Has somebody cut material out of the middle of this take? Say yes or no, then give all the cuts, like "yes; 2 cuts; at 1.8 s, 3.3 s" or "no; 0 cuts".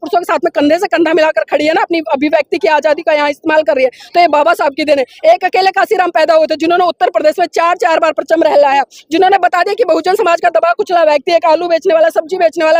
no; 0 cuts